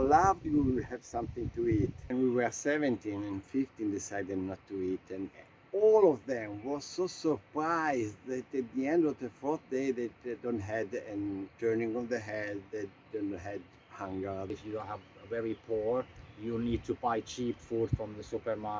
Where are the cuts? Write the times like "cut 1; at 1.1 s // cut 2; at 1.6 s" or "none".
cut 1; at 2.0 s // cut 2; at 5.3 s // cut 3; at 14.5 s